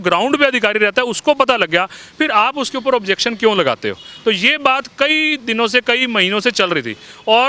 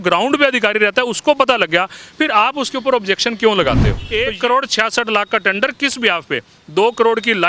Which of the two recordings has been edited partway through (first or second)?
second